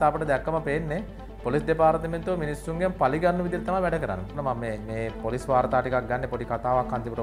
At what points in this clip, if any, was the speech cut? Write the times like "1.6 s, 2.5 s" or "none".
4.3 s